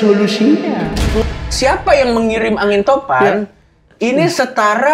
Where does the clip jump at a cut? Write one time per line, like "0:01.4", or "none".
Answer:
0:01.4